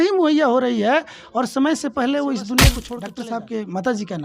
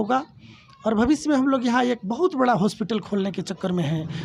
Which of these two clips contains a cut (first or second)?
first